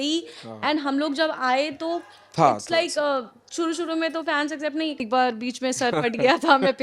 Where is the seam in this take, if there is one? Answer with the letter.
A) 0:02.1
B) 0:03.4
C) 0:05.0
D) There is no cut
C